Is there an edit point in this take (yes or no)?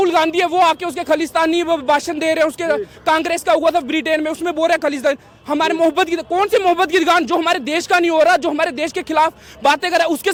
no